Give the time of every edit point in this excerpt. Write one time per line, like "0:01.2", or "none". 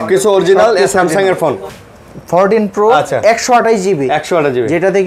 0:01.7